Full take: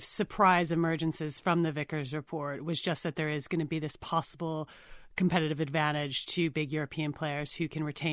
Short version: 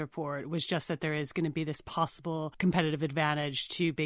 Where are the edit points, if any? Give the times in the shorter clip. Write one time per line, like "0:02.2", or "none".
0:02.5